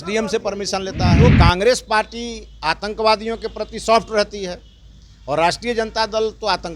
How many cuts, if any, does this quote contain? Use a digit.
1